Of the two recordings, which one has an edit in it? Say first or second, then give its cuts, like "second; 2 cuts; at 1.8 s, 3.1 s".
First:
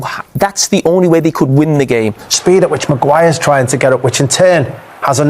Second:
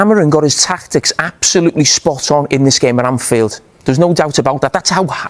first; 1 cut; at 2.3 s